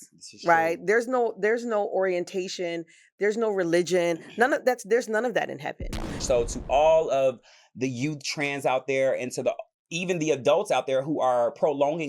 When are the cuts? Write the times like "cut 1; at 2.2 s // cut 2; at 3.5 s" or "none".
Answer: cut 1; at 6.1 s